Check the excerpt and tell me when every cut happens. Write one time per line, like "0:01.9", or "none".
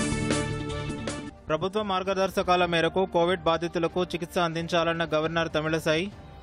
none